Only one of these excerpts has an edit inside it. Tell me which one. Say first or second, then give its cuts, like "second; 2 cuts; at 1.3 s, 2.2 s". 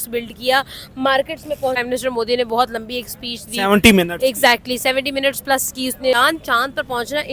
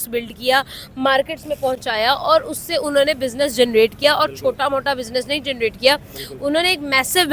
first; 2 cuts; at 1.8 s, 6.1 s